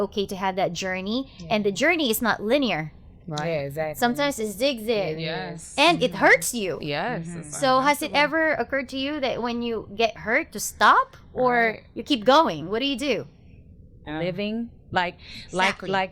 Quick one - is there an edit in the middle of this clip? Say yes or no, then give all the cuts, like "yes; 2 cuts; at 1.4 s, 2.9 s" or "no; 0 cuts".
yes; 1 cut; at 13.8 s